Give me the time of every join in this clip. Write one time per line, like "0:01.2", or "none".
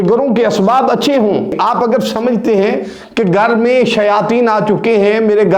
0:01.5